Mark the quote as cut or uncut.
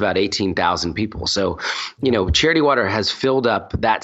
uncut